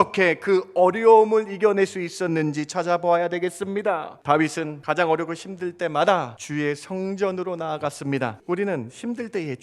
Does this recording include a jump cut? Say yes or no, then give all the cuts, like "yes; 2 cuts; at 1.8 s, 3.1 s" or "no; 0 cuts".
yes; 4 cuts; at 4.1 s, 4.8 s, 6.4 s, 8.4 s